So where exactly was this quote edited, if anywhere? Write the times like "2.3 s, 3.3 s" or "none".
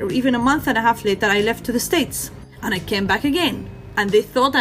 2.4 s

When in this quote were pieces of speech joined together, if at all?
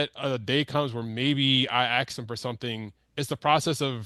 none

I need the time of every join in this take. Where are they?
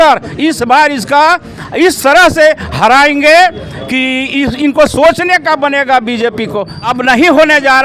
6.9 s

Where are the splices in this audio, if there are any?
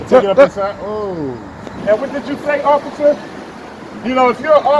1.7 s

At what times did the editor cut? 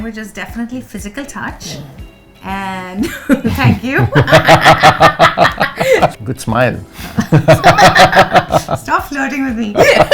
6.1 s

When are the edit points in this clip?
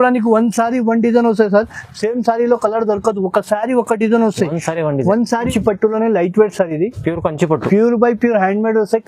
5.5 s

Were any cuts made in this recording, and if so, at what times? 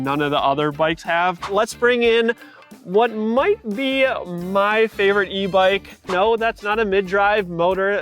1.5 s, 6.1 s

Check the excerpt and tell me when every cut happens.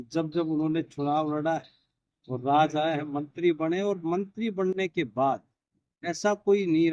none

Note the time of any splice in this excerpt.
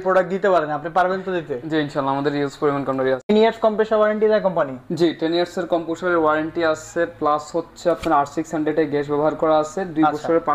3.3 s

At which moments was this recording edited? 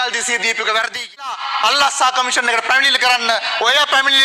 1.4 s

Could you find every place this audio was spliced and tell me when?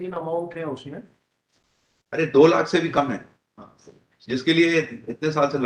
none

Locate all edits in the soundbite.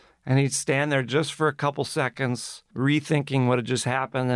none

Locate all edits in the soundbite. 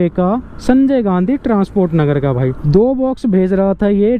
2.6 s

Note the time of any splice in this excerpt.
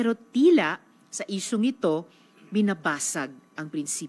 none

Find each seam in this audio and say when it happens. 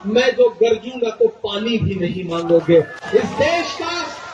none

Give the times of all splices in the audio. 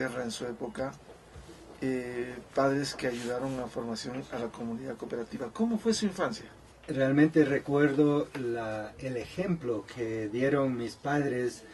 4.7 s

